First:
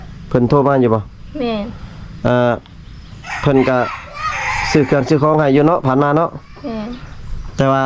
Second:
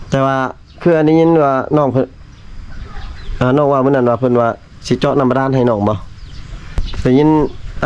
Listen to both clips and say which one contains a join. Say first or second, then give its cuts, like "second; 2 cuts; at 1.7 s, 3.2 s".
second; 1 cut; at 6.7 s